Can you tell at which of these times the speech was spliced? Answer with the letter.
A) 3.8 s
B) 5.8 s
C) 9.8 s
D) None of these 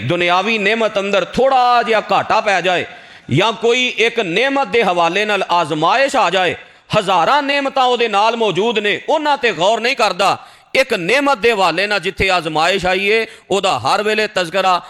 D